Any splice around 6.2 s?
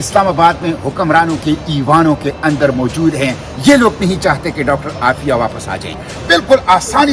yes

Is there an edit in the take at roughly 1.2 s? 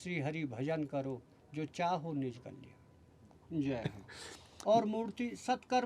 no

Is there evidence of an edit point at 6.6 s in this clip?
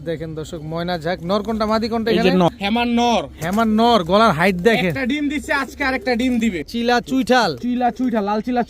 yes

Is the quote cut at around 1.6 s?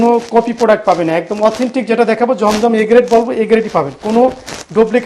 no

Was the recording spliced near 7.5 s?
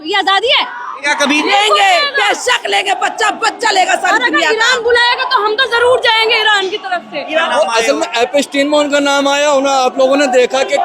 yes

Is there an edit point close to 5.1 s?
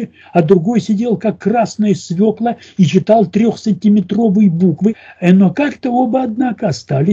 yes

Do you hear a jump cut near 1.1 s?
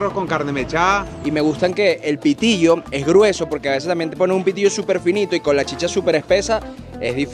yes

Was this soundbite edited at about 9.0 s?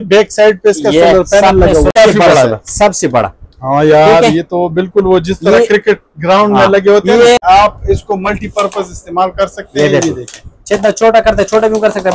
no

